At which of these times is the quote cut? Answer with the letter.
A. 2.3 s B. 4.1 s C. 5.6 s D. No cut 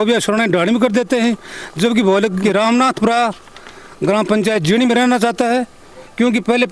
A